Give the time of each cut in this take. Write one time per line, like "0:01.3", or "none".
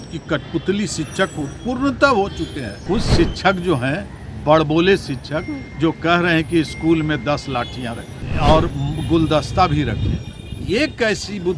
0:02.8
0:08.1